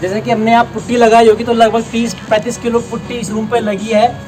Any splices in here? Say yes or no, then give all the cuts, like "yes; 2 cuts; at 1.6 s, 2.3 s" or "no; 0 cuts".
no; 0 cuts